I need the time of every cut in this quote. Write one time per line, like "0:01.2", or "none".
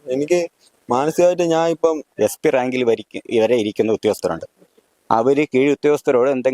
0:02.1